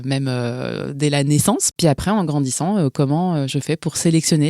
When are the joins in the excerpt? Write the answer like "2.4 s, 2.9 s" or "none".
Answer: 1.7 s